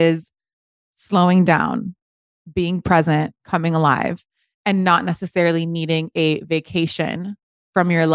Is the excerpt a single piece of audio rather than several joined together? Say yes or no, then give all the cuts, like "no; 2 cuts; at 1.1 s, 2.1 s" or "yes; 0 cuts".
yes; 0 cuts